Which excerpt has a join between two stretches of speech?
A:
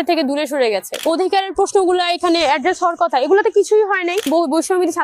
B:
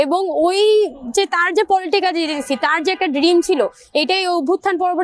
A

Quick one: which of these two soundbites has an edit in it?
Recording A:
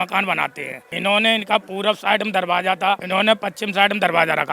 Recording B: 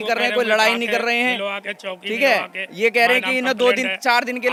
A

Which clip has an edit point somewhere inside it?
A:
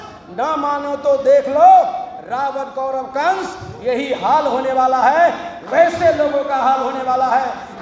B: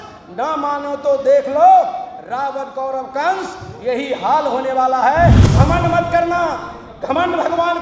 B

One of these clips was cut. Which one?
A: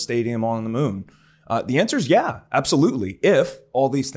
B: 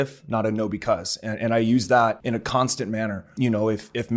B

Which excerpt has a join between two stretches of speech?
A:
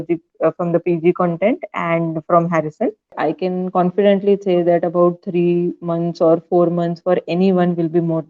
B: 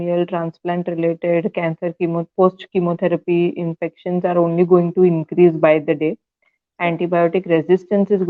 A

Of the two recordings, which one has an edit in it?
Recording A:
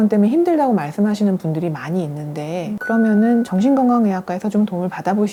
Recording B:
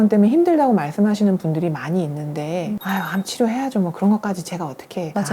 B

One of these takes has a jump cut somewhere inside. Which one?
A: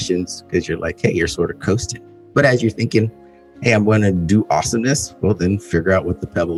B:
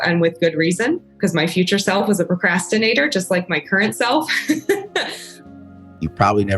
B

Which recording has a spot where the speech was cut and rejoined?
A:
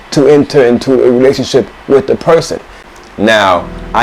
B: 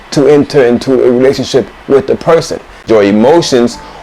B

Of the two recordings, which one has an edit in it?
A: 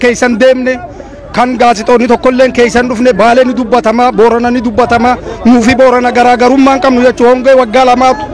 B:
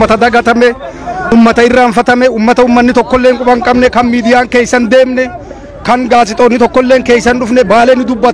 B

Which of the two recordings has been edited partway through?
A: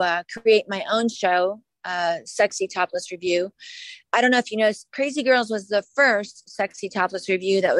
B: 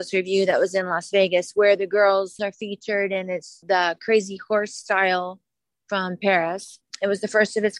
B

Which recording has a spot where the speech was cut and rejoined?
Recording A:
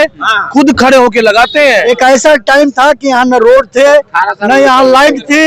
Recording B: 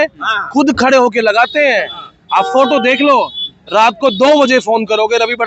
A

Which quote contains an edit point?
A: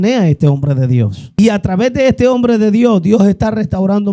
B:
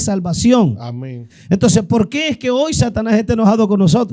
A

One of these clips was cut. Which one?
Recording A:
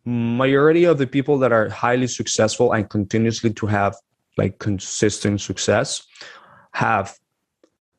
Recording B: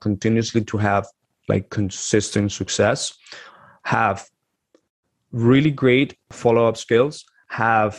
B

